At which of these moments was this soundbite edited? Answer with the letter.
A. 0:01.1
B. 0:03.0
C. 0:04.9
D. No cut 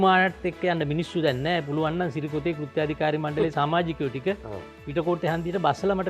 D